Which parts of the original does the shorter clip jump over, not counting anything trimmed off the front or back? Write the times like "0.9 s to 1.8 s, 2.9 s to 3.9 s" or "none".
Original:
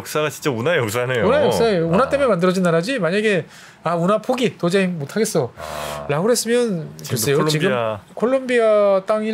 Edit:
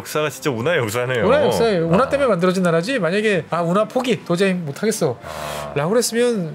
3.5 s to 3.8 s